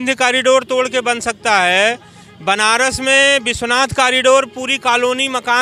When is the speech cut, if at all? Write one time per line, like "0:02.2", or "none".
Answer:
none